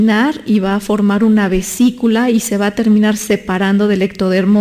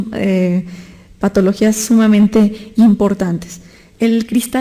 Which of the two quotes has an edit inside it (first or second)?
second